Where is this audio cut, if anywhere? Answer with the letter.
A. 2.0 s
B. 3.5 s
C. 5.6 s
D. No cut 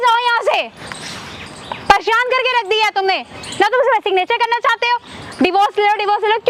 D